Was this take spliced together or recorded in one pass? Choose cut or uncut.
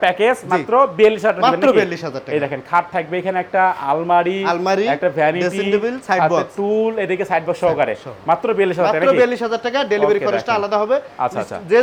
uncut